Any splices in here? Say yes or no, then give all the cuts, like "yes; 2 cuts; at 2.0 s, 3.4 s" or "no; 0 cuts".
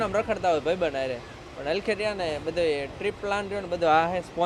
no; 0 cuts